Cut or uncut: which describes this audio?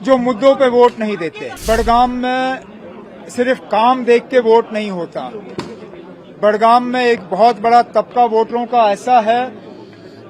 cut